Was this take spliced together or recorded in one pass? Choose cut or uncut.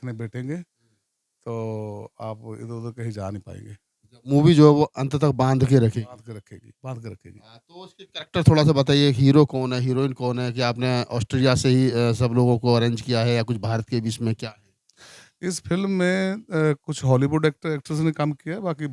uncut